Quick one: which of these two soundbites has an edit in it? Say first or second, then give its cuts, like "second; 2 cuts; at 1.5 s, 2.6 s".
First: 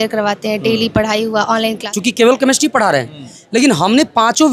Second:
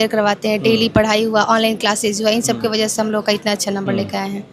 first; 1 cut; at 1.8 s